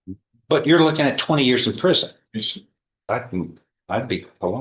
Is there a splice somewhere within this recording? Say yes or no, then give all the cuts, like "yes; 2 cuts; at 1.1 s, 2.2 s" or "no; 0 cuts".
yes; 1 cut; at 3.1 s